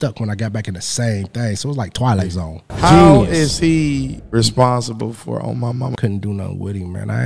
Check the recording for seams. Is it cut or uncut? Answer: cut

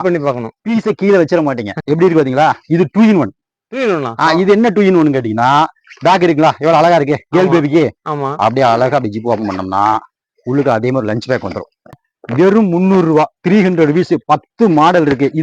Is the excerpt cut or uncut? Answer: cut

